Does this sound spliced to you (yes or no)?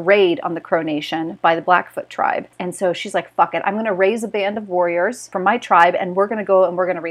yes